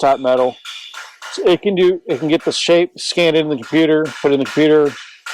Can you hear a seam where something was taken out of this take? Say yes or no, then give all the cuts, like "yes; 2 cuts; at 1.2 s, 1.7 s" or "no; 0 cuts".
no; 0 cuts